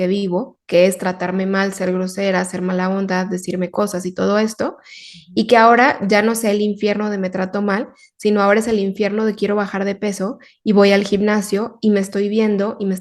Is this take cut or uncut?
uncut